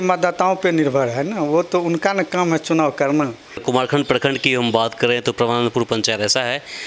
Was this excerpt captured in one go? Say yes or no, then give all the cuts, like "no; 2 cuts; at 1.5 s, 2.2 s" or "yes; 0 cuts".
no; 1 cut; at 3.6 s